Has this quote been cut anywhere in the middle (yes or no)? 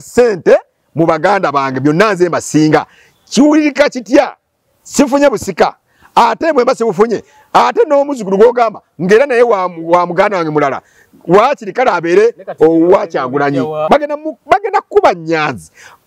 yes